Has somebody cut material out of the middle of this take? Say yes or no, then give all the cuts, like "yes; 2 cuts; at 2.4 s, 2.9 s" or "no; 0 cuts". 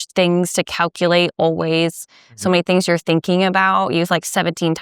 no; 0 cuts